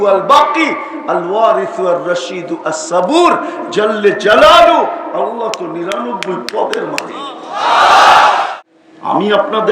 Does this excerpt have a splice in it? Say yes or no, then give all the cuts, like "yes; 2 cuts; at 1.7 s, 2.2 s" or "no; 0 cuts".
yes; 1 cut; at 8.4 s